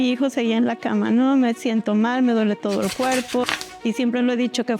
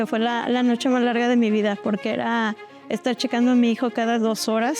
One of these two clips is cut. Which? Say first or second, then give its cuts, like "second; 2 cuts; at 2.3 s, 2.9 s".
first; 1 cut; at 3.6 s